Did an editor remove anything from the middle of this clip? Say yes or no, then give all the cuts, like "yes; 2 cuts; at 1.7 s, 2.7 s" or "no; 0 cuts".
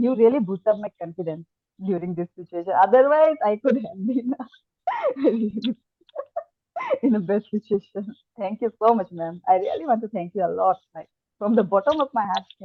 no; 0 cuts